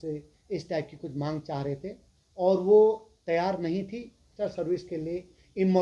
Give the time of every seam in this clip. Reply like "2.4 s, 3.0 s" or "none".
4.2 s